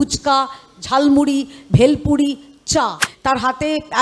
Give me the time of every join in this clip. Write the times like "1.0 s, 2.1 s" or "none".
3.1 s

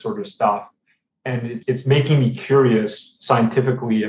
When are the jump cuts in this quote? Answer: 1.6 s

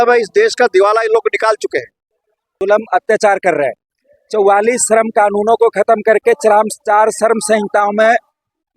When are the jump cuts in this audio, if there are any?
2.5 s

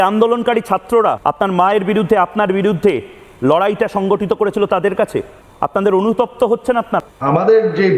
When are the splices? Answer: 7.0 s

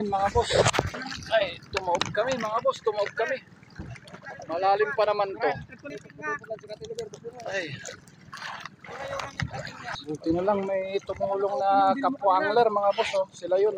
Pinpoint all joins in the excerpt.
0.9 s, 5.9 s, 10.0 s

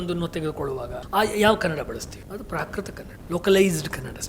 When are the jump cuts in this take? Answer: 1.0 s, 2.2 s, 3.1 s

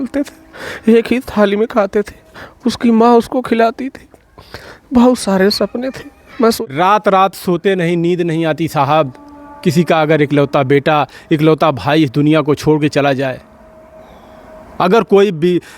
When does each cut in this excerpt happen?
6.6 s

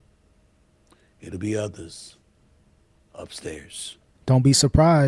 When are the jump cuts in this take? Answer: 4.1 s

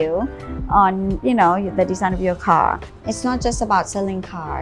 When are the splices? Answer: 2.9 s

